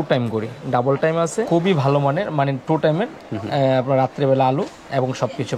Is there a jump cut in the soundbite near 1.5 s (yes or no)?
yes